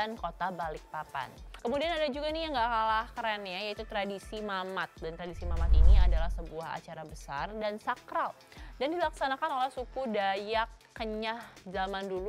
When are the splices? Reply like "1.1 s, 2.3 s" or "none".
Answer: 1.4 s